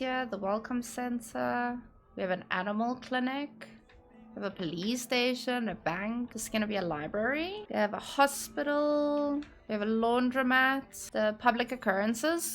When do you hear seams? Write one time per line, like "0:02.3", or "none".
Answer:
0:06.4
0:07.6
0:11.0